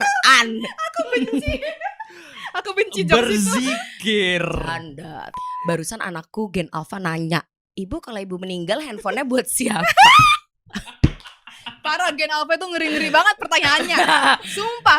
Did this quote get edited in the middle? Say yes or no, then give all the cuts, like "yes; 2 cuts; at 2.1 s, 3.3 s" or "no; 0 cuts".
yes; 1 cut; at 5.3 s